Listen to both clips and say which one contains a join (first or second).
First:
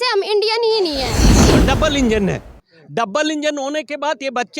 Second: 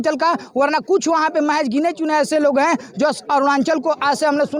first